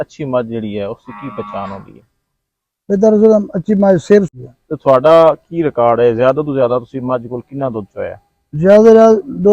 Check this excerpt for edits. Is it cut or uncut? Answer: cut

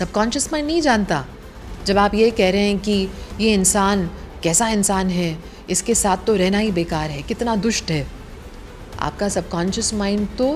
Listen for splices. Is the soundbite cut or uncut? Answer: uncut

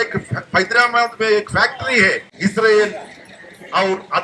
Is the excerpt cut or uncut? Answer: cut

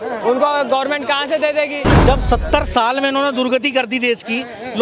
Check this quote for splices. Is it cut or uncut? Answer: cut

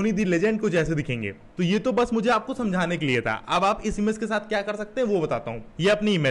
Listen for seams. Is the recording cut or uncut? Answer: uncut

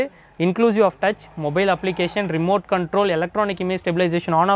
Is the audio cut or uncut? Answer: uncut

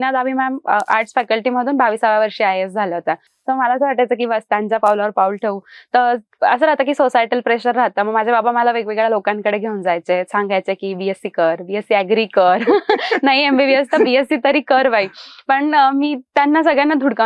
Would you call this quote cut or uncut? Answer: uncut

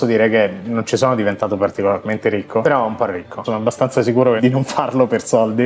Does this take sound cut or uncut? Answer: cut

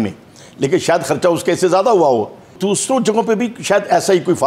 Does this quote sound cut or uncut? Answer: cut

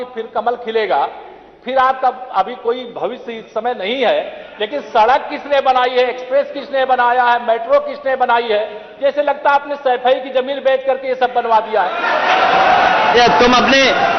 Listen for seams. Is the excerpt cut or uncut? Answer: uncut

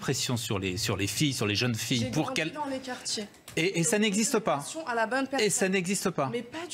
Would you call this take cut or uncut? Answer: uncut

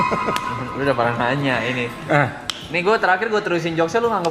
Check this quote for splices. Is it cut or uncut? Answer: uncut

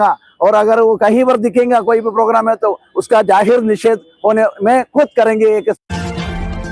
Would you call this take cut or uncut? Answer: cut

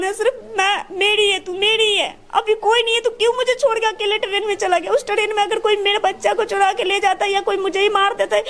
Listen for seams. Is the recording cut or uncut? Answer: uncut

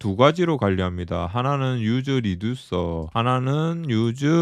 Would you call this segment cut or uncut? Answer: uncut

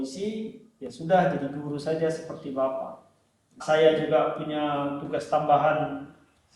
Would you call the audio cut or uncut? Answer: cut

